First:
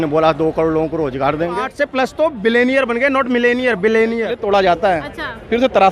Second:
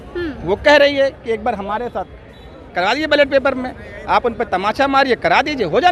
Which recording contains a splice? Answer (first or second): first